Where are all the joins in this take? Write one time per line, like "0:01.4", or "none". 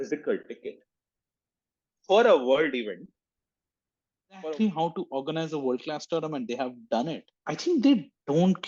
0:04.4
0:07.3